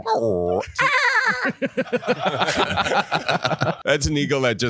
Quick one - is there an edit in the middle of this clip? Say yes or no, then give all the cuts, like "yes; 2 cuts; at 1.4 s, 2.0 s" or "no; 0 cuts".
yes; 1 cut; at 3.8 s